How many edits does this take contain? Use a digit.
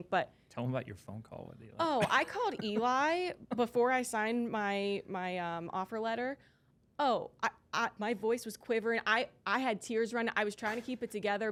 0